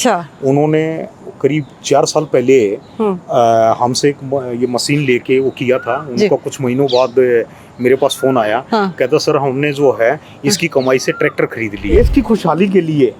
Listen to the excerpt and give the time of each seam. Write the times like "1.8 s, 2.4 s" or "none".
11.9 s